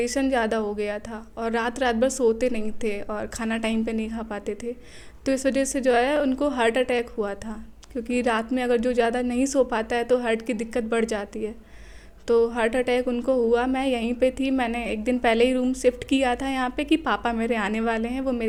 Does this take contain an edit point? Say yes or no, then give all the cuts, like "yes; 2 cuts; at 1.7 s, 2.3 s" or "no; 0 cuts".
no; 0 cuts